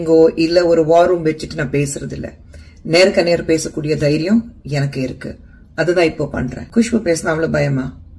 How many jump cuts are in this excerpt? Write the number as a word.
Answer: one